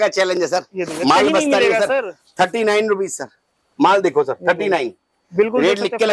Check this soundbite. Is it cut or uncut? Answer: uncut